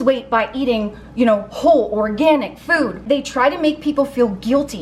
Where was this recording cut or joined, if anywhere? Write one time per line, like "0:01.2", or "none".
0:03.0